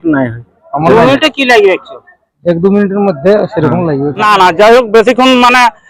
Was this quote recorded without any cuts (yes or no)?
no